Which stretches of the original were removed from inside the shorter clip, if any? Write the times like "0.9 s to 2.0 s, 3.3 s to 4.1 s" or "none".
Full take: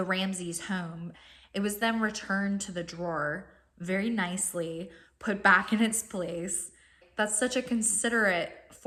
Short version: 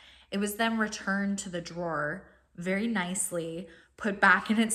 none